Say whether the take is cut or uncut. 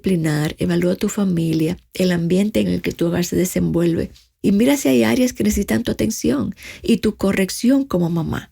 cut